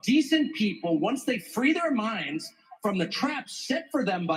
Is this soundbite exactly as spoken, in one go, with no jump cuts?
yes; 0 cuts

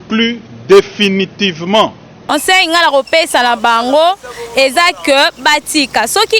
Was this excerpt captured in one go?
no; 1 cut; at 2.3 s

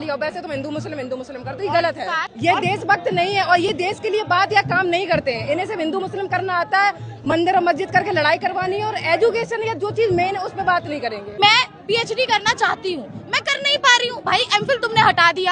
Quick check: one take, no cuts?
no; 2 cuts; at 2.2 s, 11.4 s

